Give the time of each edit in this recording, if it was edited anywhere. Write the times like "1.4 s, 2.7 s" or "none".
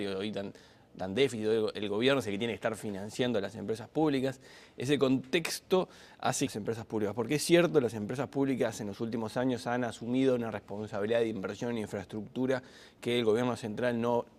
none